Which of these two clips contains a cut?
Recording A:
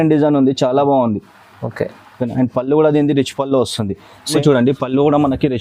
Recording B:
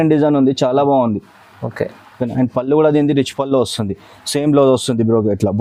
A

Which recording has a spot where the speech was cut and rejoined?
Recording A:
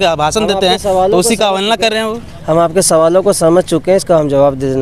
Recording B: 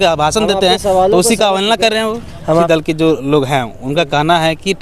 B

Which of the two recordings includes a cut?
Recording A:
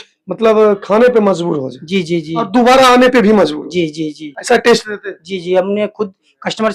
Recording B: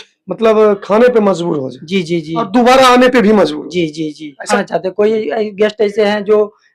B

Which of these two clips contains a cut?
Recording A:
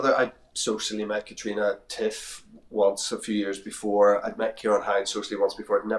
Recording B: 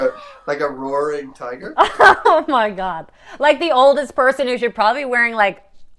B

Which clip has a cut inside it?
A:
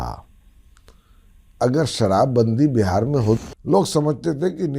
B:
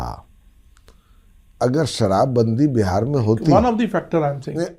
A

